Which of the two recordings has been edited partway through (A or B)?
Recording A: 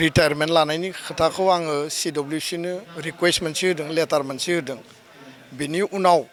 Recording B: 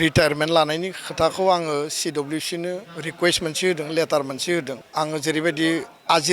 B